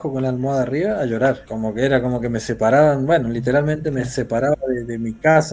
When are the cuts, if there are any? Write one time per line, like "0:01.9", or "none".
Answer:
0:01.5